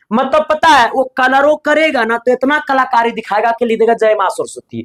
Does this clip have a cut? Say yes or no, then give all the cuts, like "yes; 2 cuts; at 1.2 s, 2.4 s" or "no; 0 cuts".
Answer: no; 0 cuts